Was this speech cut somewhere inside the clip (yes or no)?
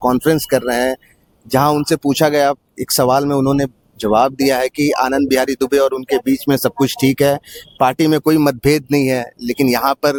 no